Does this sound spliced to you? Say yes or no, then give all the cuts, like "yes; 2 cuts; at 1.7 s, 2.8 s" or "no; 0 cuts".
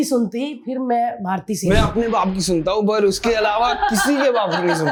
no; 0 cuts